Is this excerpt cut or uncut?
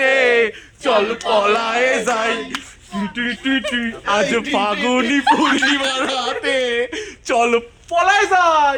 uncut